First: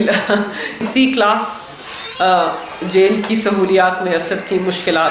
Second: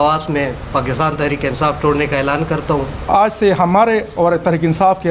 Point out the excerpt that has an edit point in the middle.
second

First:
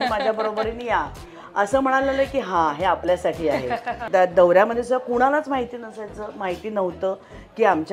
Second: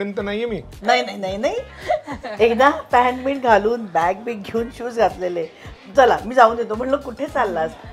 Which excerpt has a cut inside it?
first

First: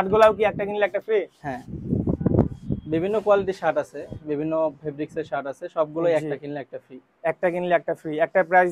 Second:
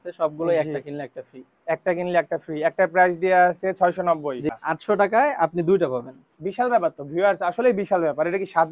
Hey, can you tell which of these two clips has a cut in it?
second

